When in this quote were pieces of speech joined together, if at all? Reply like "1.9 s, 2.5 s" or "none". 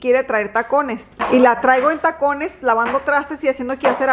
1.1 s

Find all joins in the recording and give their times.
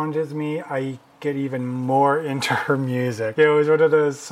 3.3 s

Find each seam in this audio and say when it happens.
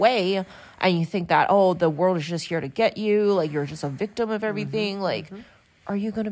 none

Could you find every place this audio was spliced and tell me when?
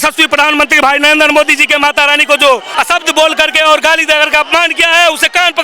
2.7 s

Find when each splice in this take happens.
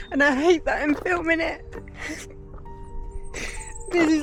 none

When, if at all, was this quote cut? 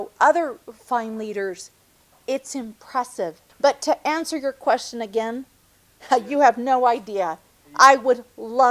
3.4 s

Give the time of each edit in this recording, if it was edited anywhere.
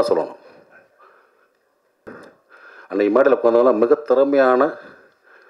2.1 s

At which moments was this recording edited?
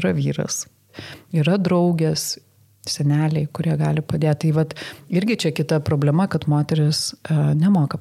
0.9 s, 2.3 s

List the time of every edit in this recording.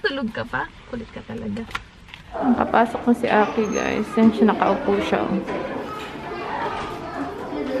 2.4 s

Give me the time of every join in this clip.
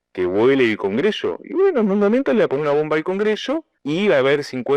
3.7 s

